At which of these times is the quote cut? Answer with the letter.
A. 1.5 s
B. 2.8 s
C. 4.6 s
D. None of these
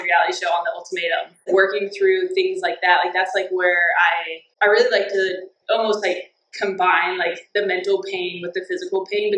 A